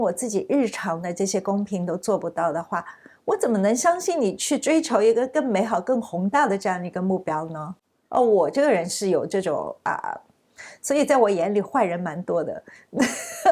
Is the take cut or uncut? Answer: uncut